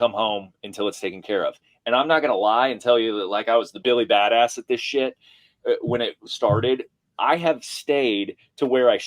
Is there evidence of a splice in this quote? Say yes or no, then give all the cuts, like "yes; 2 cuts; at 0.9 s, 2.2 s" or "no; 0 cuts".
yes; 1 cut; at 3.7 s